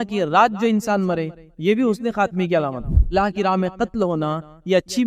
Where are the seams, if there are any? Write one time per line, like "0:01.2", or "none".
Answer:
0:03.1